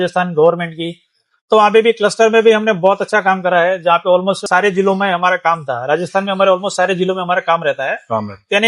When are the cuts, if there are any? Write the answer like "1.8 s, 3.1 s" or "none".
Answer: none